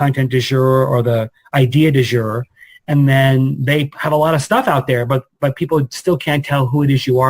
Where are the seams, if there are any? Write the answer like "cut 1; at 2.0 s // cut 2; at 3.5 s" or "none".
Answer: none